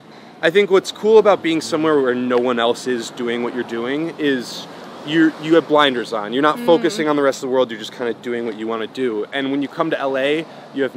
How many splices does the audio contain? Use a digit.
0